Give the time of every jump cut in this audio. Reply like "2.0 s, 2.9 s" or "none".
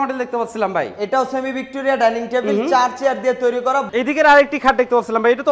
3.9 s